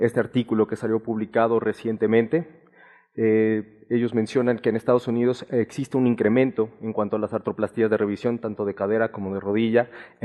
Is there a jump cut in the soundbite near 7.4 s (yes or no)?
no